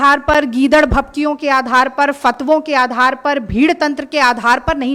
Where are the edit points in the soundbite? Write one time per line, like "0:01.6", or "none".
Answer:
none